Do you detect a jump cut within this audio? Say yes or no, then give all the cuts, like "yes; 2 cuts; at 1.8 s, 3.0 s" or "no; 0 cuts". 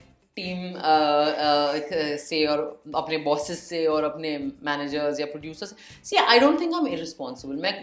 no; 0 cuts